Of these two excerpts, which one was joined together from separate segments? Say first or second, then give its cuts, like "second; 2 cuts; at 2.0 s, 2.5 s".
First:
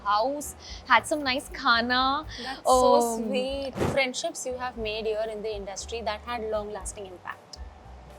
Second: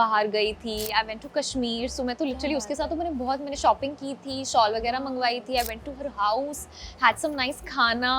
first; 1 cut; at 3.8 s